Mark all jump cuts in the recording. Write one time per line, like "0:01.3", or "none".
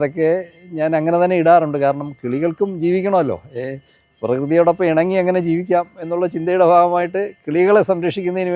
none

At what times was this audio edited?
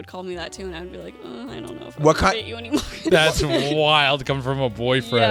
none

